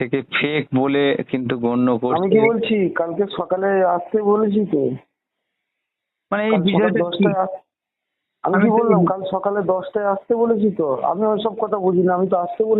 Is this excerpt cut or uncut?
uncut